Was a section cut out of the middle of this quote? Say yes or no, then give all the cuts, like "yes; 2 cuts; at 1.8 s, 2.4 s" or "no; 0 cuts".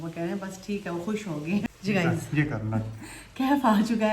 yes; 1 cut; at 1.6 s